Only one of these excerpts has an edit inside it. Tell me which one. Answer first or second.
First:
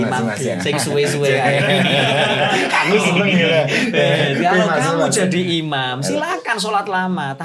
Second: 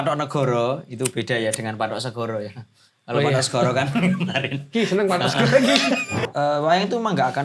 second